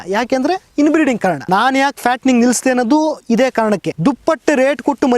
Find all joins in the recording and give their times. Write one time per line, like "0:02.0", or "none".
0:01.4
0:03.9